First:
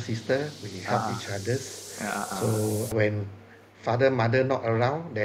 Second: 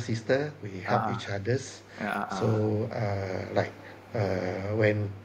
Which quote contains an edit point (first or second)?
first